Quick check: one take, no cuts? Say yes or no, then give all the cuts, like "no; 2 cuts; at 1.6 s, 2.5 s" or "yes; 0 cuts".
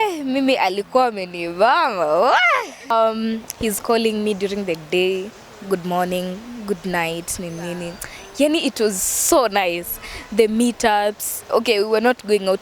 no; 1 cut; at 2.9 s